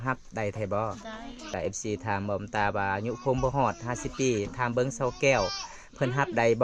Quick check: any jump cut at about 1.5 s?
yes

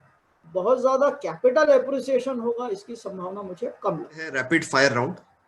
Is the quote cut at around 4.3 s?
yes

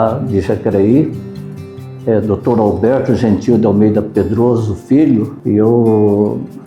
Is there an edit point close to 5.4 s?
yes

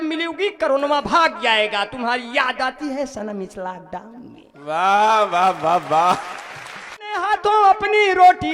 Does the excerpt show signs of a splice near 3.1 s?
no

